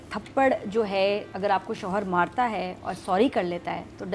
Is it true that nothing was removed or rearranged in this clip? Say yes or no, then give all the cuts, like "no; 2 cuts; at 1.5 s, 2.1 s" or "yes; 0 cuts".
no; 1 cut; at 1.3 s